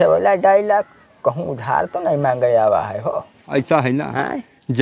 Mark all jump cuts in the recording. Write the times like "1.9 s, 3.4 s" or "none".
3.4 s